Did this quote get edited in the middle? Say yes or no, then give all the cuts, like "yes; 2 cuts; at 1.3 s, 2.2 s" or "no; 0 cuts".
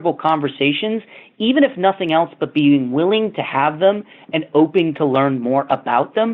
no; 0 cuts